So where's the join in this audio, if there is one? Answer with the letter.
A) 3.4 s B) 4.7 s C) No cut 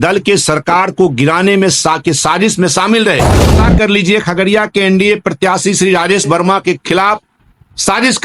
A